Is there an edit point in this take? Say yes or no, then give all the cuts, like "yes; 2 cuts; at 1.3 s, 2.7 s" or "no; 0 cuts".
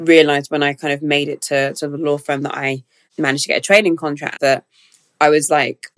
no; 0 cuts